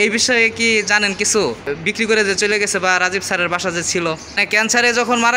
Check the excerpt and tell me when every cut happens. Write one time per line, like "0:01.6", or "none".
0:01.7
0:04.4